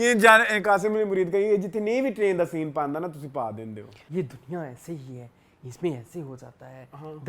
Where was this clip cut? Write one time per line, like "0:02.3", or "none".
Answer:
0:03.9